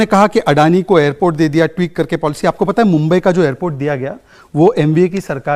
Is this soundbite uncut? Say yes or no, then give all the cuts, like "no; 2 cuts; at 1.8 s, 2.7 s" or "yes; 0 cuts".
yes; 0 cuts